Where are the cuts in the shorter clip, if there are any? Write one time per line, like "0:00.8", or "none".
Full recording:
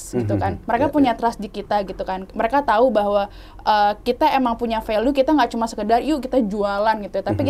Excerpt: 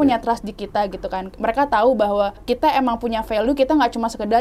0:02.4